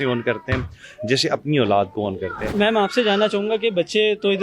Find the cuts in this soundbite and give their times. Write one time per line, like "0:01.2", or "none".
0:02.5